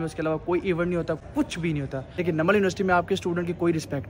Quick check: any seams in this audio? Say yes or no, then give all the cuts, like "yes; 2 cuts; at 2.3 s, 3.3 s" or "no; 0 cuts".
yes; 1 cut; at 1.6 s